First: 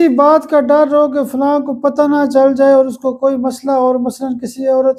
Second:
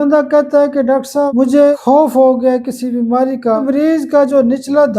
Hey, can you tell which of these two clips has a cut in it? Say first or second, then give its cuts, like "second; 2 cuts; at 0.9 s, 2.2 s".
second; 1 cut; at 3.6 s